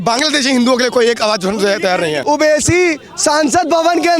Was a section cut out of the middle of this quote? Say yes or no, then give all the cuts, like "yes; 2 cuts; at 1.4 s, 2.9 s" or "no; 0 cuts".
yes; 1 cut; at 2.2 s